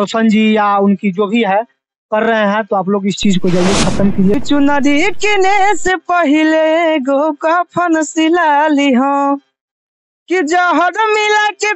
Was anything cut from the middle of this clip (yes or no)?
yes